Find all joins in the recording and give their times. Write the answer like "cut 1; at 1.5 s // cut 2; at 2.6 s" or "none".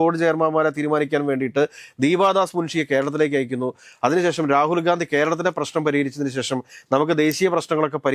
none